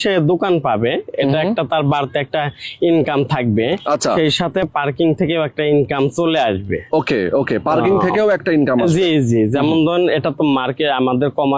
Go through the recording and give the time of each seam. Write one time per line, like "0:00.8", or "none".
none